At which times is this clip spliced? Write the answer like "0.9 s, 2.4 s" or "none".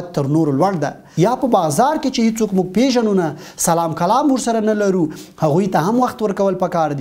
1.0 s